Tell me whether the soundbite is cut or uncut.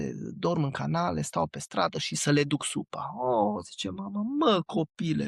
uncut